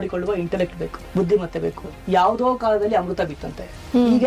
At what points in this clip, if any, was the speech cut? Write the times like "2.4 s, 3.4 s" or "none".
1.9 s